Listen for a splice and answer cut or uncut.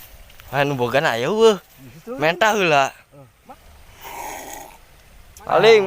cut